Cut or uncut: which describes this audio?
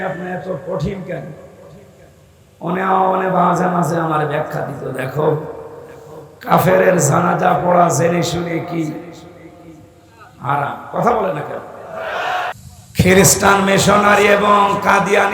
cut